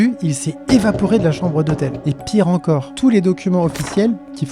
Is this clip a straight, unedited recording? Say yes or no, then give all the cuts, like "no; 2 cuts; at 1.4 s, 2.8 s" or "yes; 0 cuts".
no; 1 cut; at 2.9 s